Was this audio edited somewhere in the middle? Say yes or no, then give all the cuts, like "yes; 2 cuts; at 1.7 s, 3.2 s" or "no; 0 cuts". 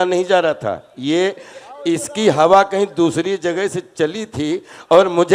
no; 0 cuts